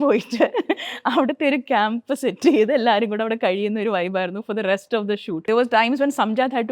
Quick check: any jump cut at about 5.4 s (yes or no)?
yes